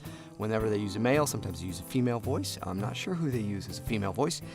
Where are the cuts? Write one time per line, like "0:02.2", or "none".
0:03.3